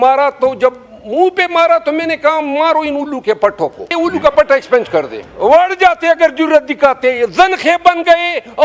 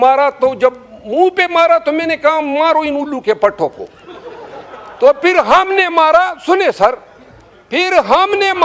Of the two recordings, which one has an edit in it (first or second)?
first